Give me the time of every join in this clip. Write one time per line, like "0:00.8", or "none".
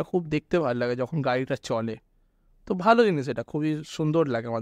none